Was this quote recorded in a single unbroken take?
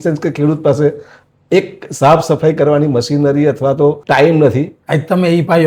no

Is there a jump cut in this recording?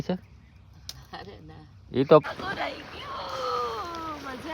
yes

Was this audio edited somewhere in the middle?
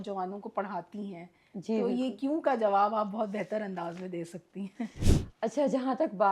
yes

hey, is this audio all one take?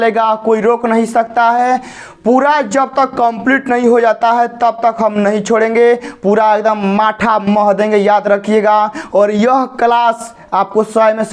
yes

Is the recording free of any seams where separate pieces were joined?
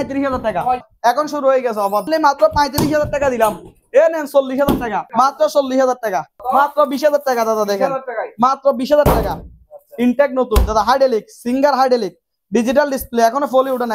no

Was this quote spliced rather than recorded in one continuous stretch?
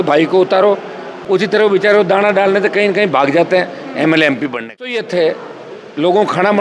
yes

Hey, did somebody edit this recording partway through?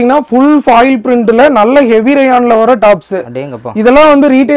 no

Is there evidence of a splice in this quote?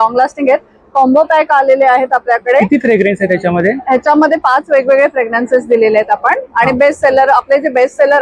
no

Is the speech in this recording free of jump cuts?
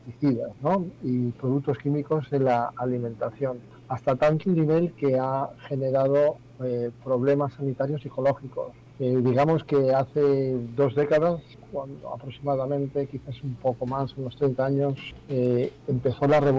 no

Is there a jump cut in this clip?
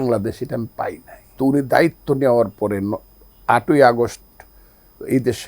yes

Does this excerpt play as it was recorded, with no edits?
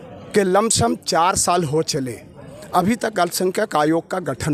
yes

